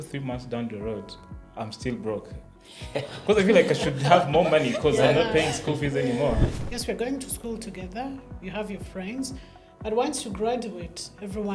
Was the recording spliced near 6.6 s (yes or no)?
yes